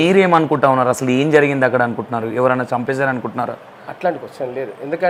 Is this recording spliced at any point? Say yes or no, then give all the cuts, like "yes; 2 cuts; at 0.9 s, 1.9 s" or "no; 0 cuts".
no; 0 cuts